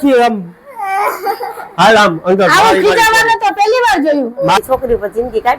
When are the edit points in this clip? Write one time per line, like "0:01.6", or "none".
0:04.6